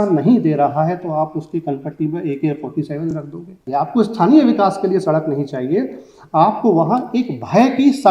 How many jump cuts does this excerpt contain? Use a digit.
1